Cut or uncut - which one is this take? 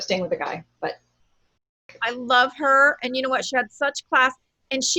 cut